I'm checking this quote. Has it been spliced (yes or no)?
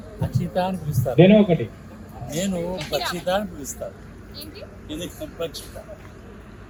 no